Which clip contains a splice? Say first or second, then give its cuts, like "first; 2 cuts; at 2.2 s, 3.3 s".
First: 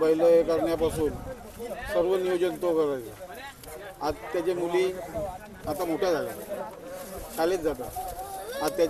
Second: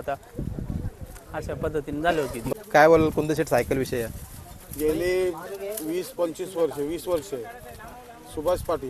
second; 1 cut; at 2.5 s